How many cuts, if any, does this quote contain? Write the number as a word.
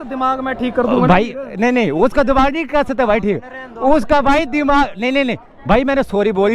zero